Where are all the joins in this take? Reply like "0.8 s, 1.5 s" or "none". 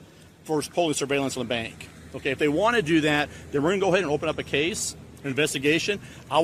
none